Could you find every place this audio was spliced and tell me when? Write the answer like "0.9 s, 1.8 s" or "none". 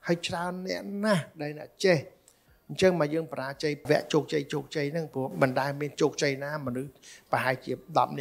3.8 s